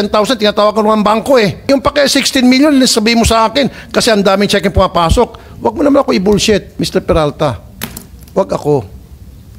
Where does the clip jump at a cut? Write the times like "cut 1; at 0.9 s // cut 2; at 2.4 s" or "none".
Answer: cut 1; at 1.6 s // cut 2; at 6.7 s